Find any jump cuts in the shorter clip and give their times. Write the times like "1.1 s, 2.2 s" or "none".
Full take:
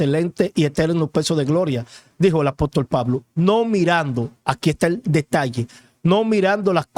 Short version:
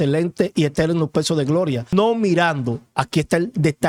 1.9 s